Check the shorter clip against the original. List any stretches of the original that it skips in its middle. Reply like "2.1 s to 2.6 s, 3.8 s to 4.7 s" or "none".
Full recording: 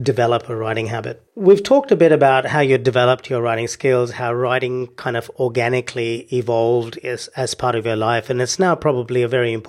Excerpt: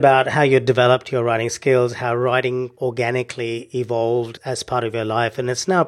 4.9 s to 5.3 s, 6.9 s to 7.3 s